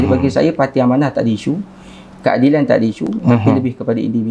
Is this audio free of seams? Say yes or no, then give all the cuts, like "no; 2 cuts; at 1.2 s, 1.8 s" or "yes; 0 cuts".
yes; 0 cuts